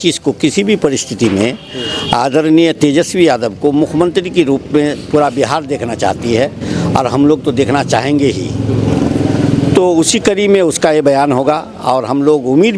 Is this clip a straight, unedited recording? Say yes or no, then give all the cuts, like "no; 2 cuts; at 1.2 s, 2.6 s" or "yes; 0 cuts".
yes; 0 cuts